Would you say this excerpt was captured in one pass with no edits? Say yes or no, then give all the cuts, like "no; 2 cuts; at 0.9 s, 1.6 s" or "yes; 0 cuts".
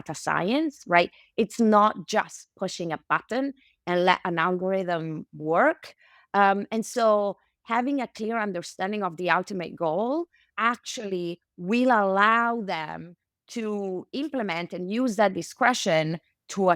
yes; 0 cuts